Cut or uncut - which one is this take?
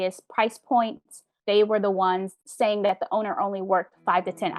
cut